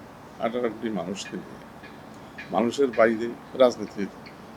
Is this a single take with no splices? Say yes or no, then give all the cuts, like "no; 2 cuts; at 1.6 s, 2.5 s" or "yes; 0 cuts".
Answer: no; 1 cut; at 3.4 s